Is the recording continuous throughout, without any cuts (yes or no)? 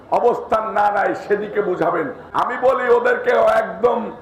no